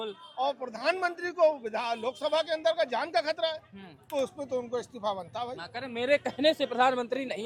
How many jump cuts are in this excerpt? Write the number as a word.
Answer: zero